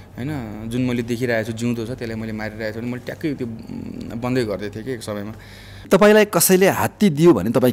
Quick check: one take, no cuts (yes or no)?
no